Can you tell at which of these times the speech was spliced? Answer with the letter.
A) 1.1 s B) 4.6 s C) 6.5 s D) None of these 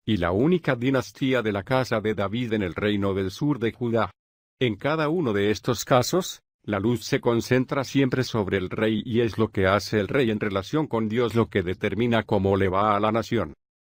D